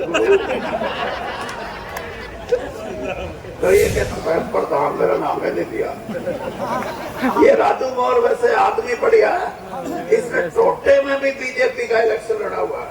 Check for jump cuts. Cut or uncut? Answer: cut